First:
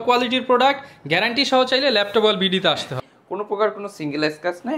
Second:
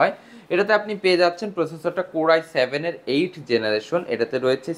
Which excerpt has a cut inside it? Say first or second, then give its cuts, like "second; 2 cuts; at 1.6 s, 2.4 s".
first; 1 cut; at 3.0 s